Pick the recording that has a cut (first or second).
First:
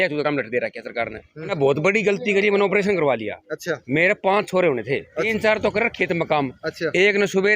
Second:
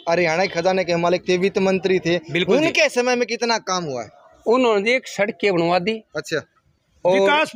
first